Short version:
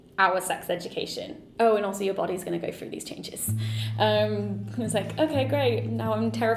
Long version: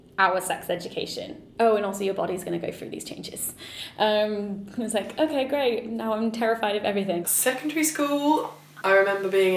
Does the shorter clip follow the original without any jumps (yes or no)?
yes